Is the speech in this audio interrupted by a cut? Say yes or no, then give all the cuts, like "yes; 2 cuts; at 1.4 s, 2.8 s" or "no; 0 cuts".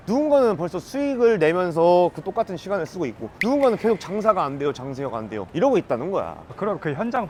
no; 0 cuts